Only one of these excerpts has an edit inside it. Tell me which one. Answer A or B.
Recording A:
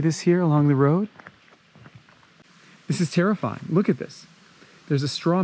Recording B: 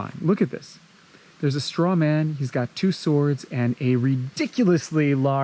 A